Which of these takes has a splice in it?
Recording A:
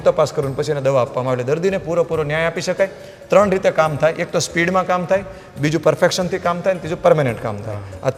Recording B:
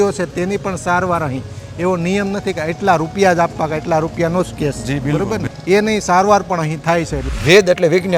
B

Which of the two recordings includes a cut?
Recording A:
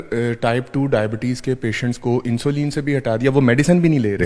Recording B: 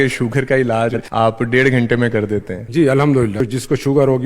B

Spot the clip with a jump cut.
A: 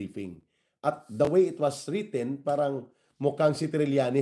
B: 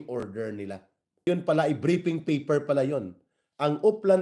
B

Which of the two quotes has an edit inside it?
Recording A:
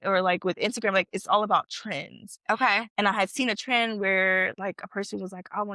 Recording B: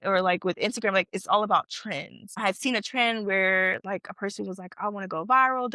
B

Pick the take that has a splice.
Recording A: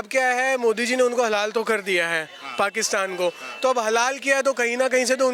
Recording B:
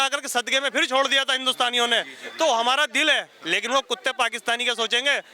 B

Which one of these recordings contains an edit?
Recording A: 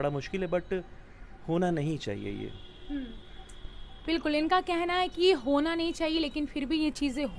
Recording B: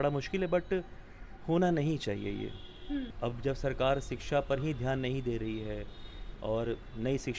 B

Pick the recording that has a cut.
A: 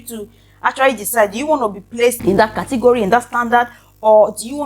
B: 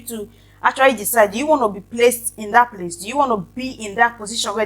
A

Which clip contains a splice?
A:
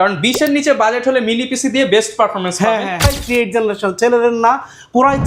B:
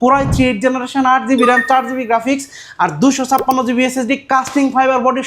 A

